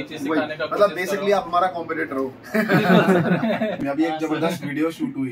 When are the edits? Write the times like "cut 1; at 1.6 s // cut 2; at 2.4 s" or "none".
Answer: cut 1; at 3.8 s